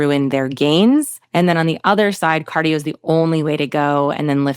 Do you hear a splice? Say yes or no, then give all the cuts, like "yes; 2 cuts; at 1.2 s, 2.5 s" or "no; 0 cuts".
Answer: yes; 1 cut; at 1.2 s